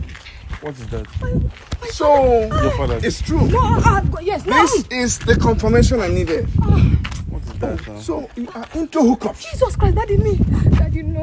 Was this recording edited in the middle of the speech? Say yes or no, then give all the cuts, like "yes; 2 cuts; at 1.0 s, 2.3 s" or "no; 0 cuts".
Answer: no; 0 cuts